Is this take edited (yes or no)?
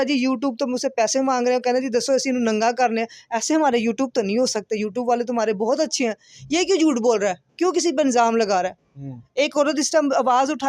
no